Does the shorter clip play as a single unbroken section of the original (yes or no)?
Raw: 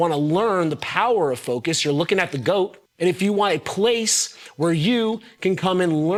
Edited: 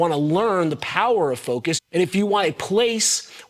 no